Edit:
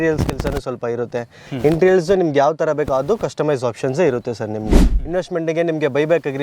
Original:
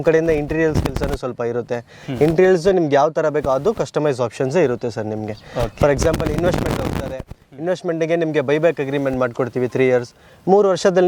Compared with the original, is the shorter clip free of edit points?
no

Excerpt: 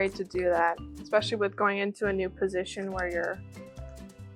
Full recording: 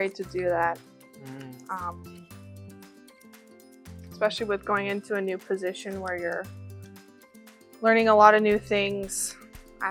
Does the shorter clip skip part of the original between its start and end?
yes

